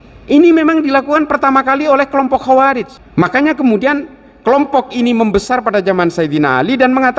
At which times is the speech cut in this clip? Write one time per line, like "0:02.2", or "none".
0:02.9